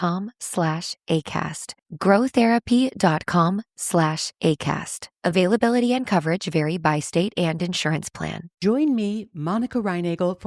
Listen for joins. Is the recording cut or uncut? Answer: cut